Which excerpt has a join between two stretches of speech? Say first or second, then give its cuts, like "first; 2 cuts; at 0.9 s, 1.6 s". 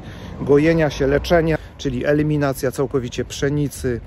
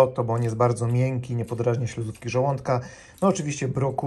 first; 1 cut; at 1.6 s